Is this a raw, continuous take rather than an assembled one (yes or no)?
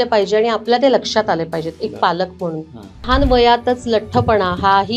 no